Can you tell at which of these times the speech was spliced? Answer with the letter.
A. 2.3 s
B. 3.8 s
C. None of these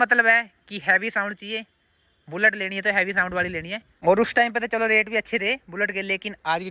B